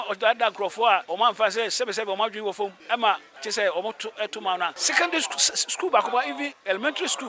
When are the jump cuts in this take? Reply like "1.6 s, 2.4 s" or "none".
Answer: 1.1 s, 2.8 s, 3.3 s, 4.8 s